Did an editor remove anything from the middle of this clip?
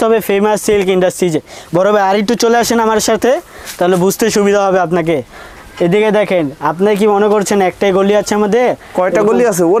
no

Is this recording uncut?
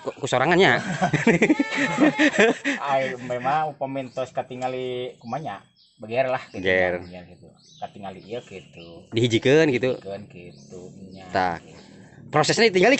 yes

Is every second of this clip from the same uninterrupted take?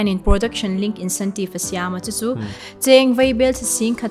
no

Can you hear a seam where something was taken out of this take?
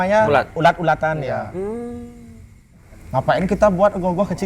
yes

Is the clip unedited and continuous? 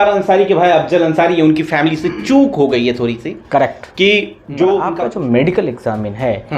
no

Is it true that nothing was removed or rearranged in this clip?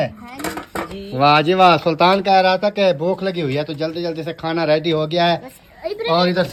yes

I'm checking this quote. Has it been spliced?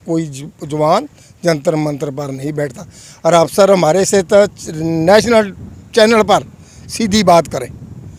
no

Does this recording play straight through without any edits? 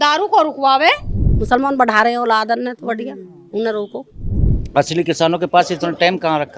no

